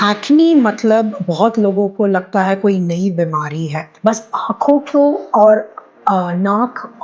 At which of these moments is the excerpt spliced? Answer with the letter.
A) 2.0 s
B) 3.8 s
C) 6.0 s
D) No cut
B